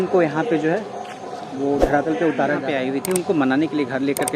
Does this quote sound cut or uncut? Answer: cut